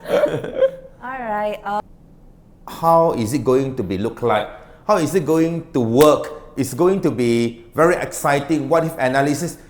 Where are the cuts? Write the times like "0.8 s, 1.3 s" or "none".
1.8 s